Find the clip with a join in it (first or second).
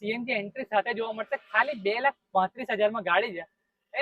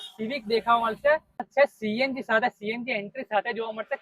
second